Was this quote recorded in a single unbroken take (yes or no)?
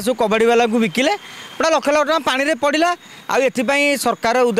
yes